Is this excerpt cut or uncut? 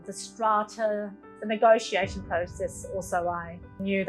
cut